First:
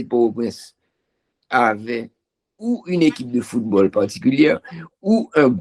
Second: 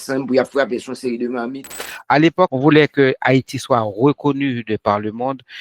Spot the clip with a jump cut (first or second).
second